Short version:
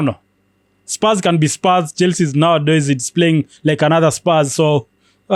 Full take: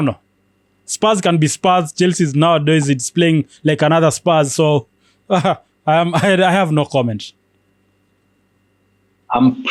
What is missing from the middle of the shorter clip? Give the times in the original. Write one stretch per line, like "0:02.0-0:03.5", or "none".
none